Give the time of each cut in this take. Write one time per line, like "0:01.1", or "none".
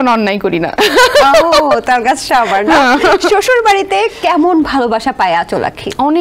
none